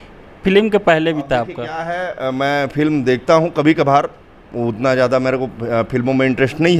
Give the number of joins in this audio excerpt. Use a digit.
0